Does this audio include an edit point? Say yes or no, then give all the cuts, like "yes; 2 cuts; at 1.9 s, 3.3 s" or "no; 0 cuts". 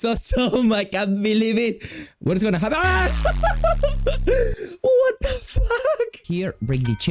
yes; 1 cut; at 6.2 s